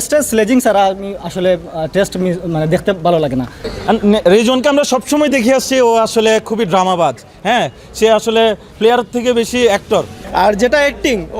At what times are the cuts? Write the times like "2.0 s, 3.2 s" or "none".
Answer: 3.6 s, 10.2 s